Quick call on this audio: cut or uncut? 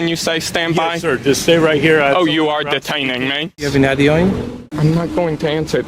cut